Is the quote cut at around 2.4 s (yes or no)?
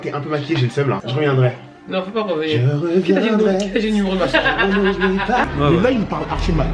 no